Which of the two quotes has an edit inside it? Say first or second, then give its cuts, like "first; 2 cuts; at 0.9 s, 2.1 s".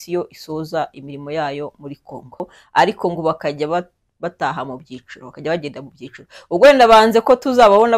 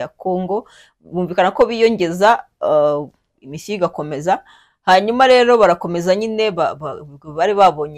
first; 1 cut; at 2.6 s